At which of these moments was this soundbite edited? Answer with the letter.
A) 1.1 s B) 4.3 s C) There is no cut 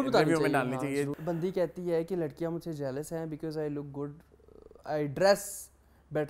A